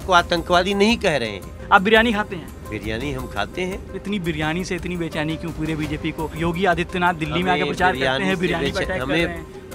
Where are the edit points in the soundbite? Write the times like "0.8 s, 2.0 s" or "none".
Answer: 1.6 s, 2.6 s, 3.9 s, 6.3 s